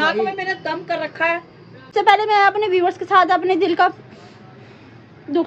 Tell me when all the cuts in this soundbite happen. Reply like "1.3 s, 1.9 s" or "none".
1.9 s